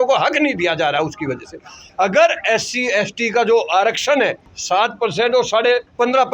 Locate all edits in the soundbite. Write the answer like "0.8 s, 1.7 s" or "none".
1.9 s, 4.5 s